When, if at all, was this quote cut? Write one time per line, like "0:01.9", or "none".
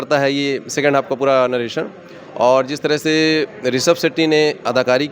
none